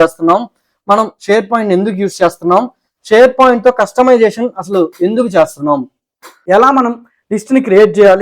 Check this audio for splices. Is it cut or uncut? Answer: cut